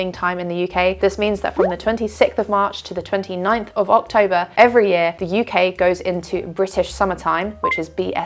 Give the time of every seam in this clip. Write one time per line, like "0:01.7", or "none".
none